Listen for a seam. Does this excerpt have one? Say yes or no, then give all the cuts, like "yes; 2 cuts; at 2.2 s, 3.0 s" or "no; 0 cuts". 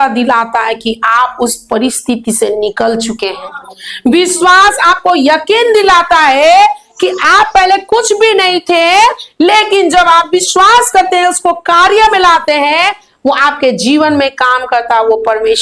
no; 0 cuts